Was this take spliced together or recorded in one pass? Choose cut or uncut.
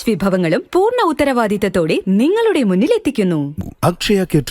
cut